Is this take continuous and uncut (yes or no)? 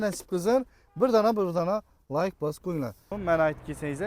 no